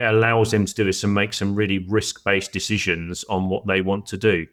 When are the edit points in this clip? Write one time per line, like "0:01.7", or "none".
none